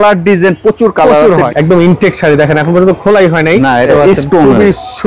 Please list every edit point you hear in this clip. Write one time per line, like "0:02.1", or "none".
0:01.5
0:03.9